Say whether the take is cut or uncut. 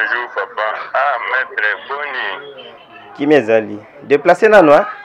uncut